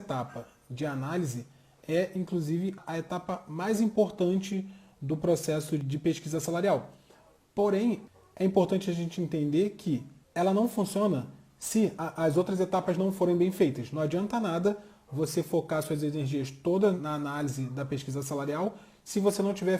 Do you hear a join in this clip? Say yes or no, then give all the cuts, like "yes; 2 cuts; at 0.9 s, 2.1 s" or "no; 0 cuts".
yes; 5 cuts; at 2.8 s, 5.8 s, 8.1 s, 12.0 s, 17.0 s